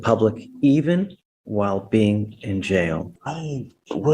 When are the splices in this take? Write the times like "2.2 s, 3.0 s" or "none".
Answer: 3.1 s